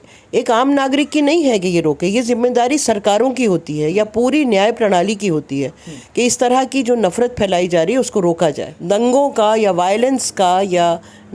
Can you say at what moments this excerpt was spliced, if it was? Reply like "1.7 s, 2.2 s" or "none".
8.7 s